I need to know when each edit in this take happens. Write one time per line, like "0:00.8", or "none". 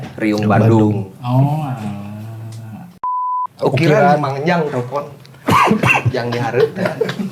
0:03.0